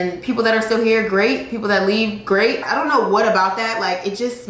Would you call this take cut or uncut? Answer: cut